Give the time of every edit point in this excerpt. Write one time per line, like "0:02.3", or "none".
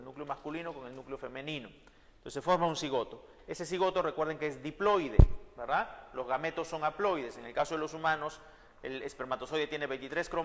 none

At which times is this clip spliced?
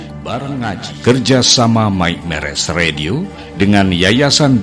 0:01.0

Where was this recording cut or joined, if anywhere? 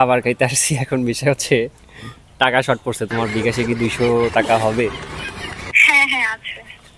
none

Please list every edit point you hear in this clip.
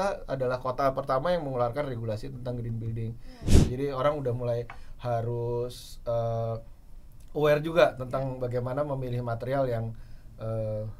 0:03.6

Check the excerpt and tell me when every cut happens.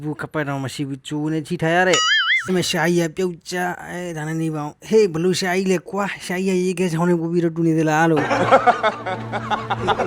0:02.4

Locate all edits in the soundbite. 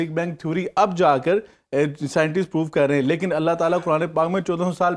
none

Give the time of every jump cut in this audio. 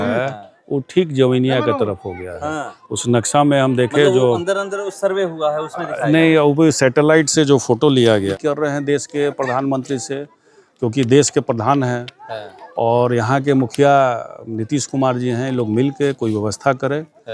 0:08.3

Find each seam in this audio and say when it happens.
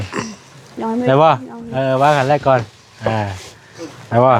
none

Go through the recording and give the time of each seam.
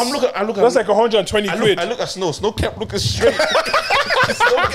none

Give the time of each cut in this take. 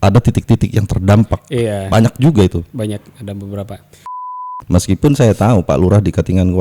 0:04.3

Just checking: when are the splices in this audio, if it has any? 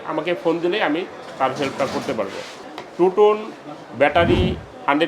0:02.6

